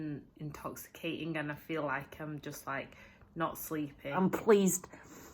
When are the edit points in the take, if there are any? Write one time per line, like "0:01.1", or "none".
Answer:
0:04.2

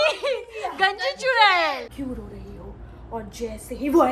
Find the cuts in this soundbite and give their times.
0:01.9

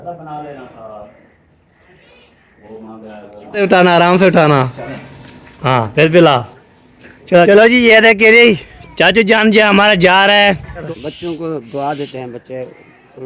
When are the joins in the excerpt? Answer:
0:03.6
0:07.5
0:10.8

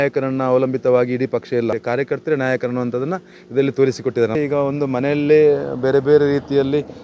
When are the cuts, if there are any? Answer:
0:01.8
0:04.4

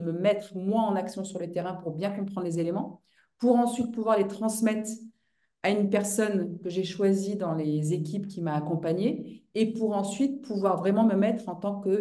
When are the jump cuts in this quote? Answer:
none

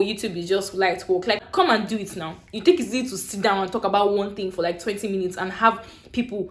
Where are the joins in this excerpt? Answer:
0:01.5

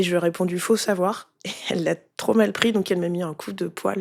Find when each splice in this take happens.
none

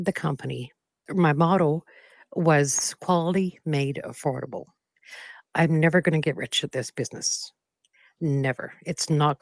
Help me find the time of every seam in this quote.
0:01.0

